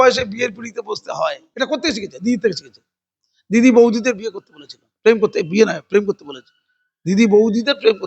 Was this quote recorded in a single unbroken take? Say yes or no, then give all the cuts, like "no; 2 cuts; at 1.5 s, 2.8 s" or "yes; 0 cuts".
no; 1 cut; at 1.4 s